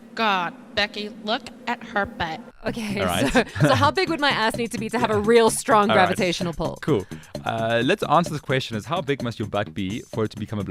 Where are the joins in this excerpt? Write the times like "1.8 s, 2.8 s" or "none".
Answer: 2.5 s